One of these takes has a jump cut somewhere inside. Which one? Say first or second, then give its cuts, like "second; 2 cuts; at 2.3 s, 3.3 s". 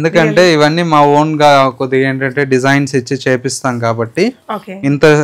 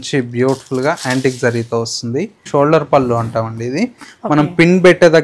second; 1 cut; at 2.5 s